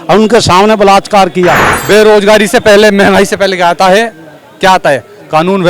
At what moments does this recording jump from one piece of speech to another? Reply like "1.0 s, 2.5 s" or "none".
1.7 s